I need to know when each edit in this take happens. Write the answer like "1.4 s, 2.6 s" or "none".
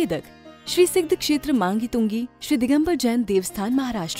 none